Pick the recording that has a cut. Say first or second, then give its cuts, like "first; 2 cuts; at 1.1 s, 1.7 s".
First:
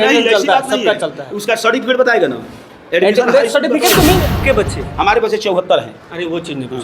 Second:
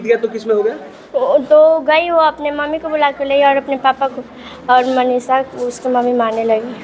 first; 1 cut; at 4.3 s